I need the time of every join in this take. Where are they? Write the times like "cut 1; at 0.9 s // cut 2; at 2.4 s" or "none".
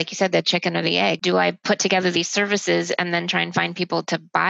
cut 1; at 1.2 s